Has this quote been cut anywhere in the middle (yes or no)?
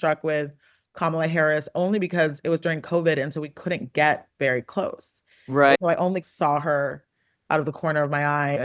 no